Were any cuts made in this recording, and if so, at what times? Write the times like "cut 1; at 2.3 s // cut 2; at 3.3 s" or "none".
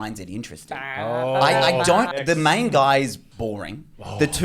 cut 1; at 2.1 s